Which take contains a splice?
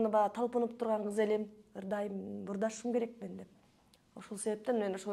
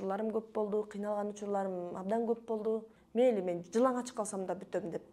second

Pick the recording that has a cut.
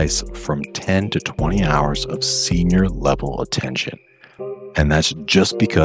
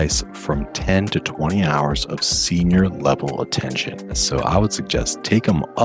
second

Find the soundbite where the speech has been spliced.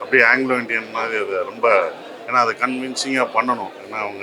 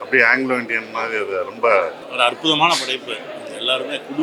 second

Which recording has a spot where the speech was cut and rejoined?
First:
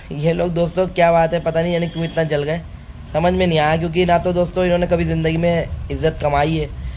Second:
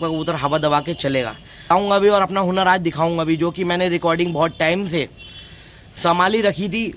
second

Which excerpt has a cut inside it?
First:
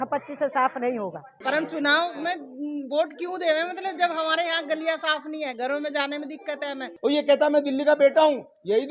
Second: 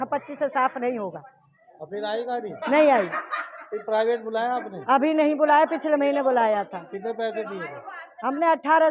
first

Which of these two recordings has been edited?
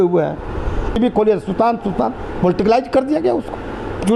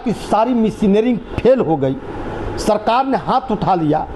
first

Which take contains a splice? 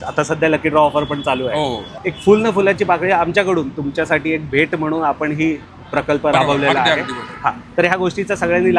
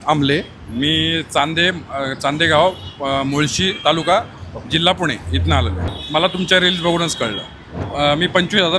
second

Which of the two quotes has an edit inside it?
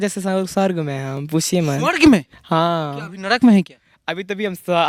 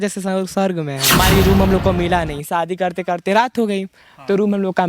second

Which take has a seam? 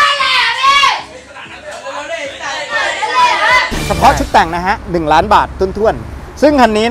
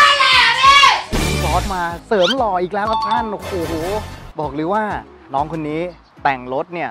second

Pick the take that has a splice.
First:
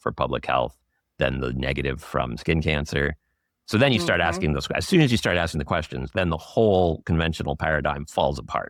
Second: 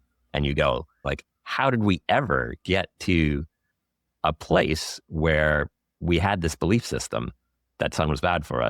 second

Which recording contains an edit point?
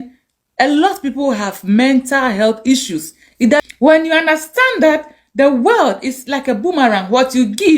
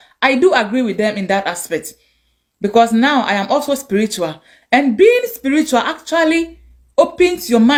first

